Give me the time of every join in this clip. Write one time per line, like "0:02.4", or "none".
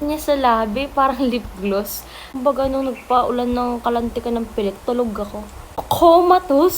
0:02.3
0:05.8

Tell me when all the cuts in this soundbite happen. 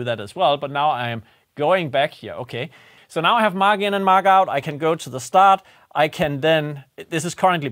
0:02.9

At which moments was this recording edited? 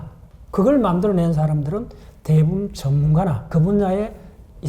0:03.4

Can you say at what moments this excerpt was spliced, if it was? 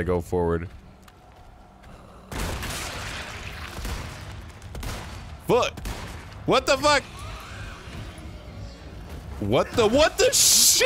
none

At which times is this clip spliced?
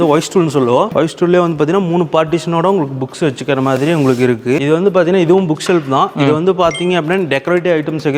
0:00.9
0:04.6

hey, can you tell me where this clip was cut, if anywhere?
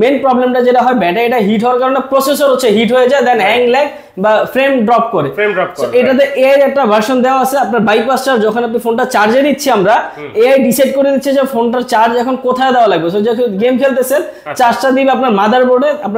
none

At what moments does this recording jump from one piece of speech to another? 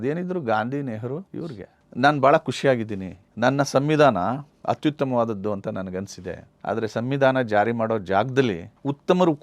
0:01.4

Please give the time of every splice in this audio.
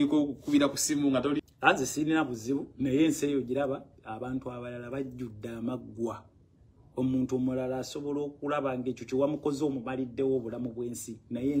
0:01.4

